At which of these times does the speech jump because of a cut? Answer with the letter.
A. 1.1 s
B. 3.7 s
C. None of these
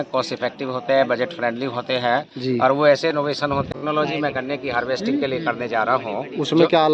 B